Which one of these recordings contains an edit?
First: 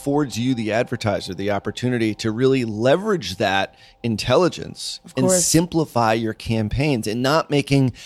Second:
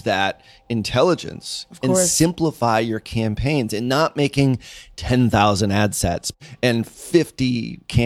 second; 1 cut; at 6.3 s

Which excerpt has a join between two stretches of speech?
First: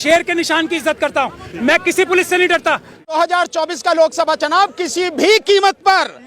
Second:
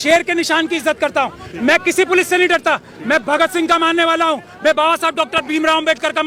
first; 1 cut; at 3.1 s

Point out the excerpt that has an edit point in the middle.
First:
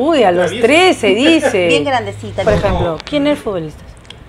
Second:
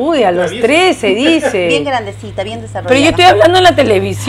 first; 1 cut; at 2.4 s

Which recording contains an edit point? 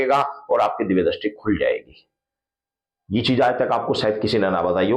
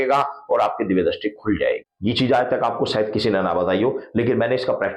second; 1 cut; at 1.9 s

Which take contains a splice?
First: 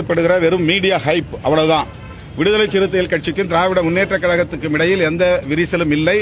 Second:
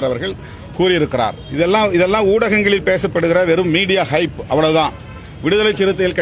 second; 1 cut; at 1.4 s

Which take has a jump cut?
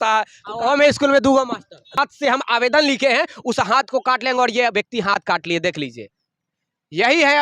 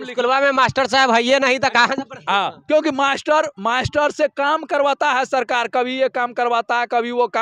first; 1 cut; at 1.9 s

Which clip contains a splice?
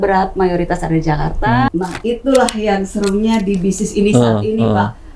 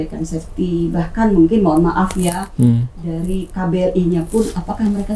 first; 1 cut; at 1.7 s

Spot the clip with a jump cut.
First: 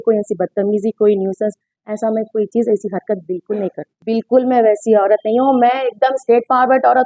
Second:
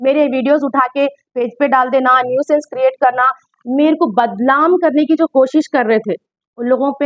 first; 1 cut; at 4.0 s

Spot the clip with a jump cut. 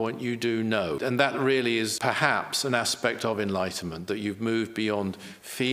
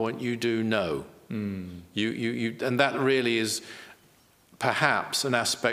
first; 2 cuts; at 1.0 s, 1.9 s

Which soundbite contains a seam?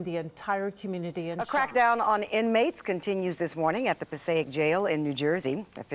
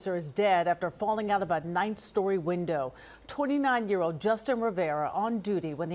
first; 1 cut; at 1.4 s

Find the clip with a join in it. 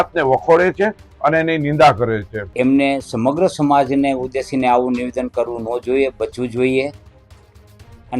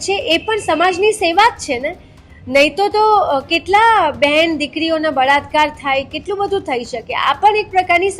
first; 1 cut; at 2.4 s

